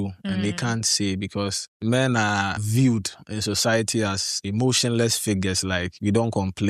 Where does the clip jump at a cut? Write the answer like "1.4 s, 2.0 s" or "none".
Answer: 1.7 s, 2.6 s, 4.3 s